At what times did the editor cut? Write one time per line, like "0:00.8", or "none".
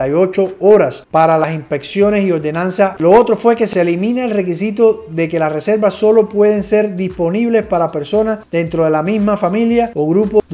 0:02.9

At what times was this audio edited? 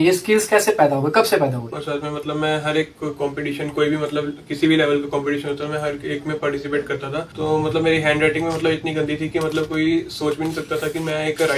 0:01.8
0:07.3

